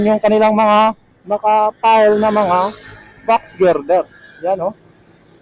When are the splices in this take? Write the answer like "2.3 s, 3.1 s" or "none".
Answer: 1.1 s